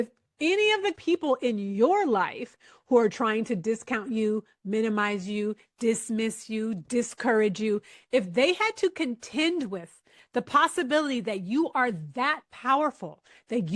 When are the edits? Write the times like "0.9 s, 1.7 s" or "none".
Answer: 1.0 s